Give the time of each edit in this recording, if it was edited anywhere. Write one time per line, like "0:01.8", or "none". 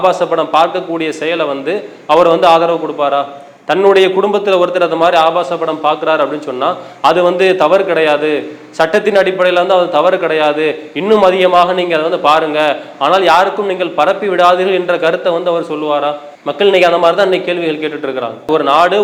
none